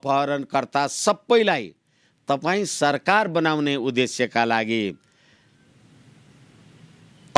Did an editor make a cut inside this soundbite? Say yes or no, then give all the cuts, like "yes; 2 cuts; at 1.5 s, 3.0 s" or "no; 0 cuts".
no; 0 cuts